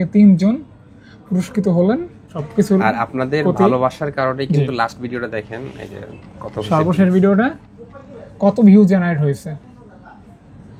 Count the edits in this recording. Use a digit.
0